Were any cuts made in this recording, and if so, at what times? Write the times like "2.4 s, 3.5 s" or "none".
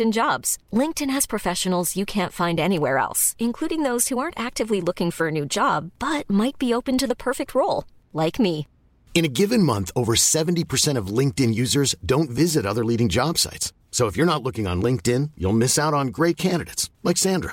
none

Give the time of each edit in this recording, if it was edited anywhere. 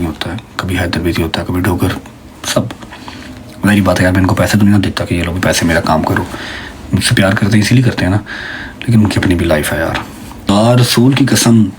10.5 s

